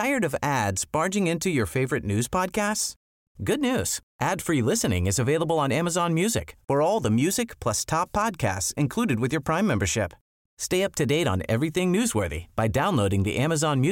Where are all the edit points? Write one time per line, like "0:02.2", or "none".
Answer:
none